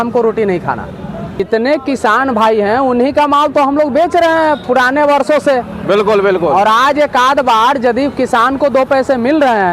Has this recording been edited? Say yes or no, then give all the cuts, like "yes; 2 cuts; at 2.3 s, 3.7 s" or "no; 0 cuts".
yes; 1 cut; at 1.4 s